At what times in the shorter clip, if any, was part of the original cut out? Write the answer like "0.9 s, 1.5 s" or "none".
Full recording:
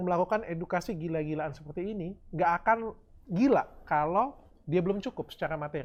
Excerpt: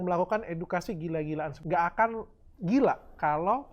1.6 s